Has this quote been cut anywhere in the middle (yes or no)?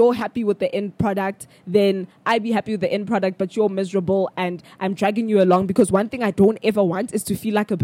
no